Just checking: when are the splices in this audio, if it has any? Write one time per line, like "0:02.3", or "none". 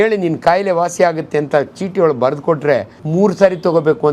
0:03.0